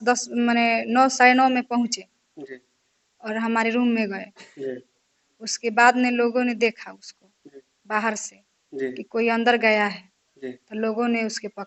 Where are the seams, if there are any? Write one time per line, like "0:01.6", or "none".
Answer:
none